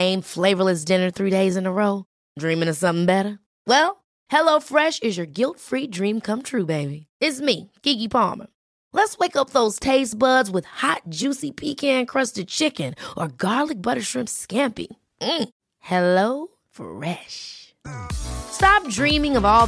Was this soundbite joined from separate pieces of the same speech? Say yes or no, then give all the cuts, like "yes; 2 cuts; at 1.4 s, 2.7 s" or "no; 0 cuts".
no; 0 cuts